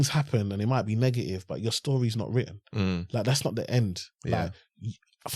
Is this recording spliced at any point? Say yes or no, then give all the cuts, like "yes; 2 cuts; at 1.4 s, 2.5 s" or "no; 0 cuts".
no; 0 cuts